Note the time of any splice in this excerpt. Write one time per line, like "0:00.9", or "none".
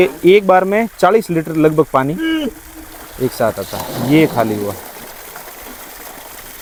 none